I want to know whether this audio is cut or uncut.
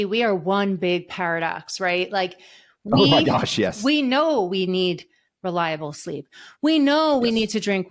uncut